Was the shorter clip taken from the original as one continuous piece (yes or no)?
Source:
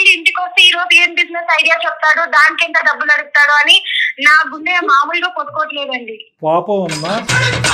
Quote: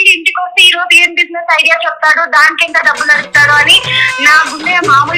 yes